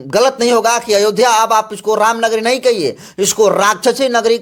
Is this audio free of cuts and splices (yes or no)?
yes